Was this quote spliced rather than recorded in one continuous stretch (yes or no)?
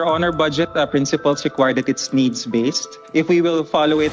yes